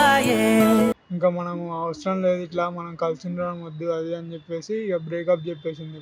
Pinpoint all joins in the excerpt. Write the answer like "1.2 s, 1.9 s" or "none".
1.1 s